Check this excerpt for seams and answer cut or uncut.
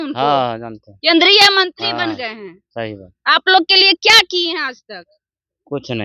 uncut